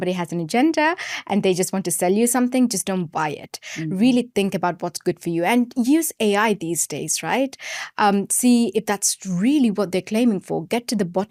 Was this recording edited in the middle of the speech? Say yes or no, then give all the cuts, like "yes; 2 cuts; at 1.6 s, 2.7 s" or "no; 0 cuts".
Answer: no; 0 cuts